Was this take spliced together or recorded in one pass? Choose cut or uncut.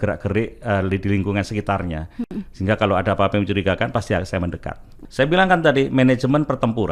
cut